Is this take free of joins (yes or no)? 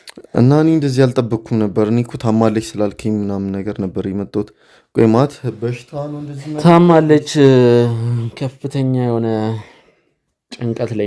yes